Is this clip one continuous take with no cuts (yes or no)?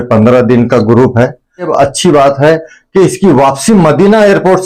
no